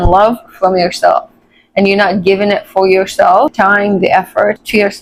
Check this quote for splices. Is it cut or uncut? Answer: uncut